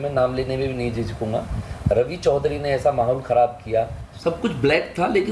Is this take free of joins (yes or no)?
no